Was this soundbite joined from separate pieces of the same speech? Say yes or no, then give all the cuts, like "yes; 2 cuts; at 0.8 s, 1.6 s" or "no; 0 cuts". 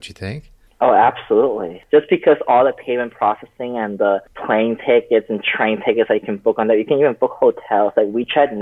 yes; 2 cuts; at 1.8 s, 4.3 s